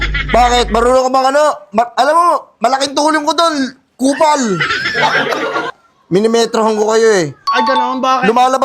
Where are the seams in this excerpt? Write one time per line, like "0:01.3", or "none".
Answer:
0:05.8